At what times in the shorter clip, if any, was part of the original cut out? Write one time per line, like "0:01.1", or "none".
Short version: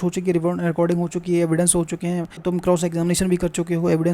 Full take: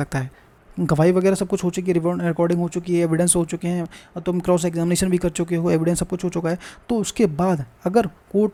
0:02.3